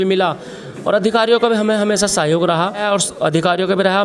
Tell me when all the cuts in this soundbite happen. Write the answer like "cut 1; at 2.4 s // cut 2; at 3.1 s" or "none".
cut 1; at 2.8 s